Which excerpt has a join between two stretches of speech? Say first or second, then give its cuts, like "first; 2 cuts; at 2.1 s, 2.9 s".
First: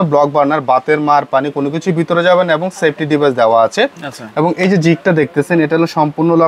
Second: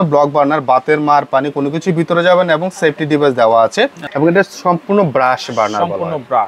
second; 1 cut; at 4.0 s